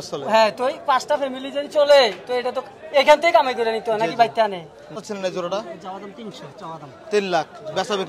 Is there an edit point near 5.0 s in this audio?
yes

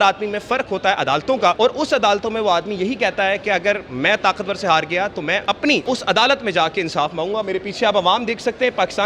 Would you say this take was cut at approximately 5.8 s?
yes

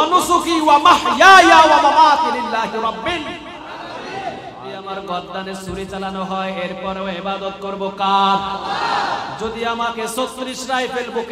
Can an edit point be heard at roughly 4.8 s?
yes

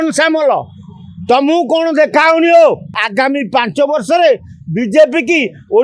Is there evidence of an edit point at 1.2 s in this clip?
no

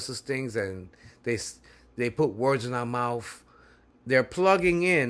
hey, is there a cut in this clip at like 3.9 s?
yes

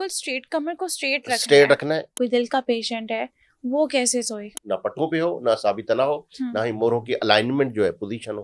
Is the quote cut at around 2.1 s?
yes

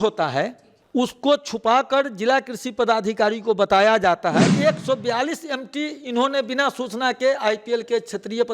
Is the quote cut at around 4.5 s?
yes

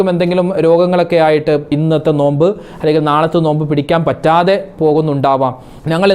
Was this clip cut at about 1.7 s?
yes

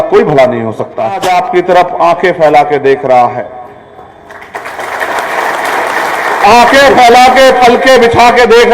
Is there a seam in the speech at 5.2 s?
no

